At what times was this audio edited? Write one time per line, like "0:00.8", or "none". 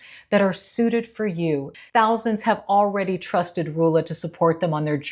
0:01.7